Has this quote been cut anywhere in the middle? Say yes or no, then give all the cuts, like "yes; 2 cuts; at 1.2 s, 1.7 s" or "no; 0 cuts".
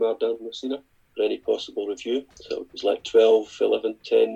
yes; 2 cuts; at 1.0 s, 2.3 s